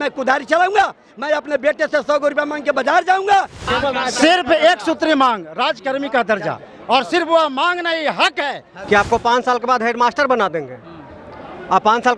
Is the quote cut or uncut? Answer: cut